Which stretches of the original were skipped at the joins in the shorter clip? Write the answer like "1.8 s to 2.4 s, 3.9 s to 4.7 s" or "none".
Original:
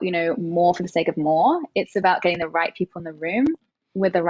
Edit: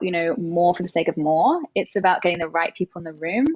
none